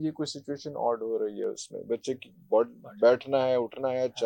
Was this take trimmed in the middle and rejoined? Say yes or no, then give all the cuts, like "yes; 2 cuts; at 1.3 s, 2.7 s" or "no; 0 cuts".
no; 0 cuts